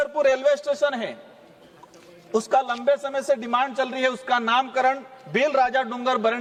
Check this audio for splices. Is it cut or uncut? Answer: uncut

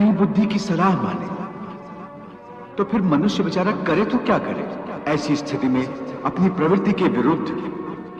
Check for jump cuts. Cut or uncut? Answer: cut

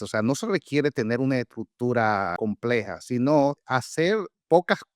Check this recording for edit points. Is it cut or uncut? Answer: cut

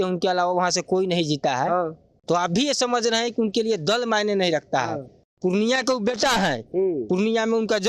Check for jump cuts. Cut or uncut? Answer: uncut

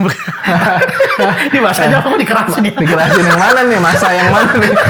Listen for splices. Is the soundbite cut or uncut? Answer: uncut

